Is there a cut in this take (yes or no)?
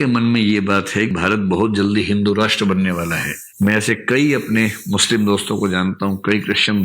yes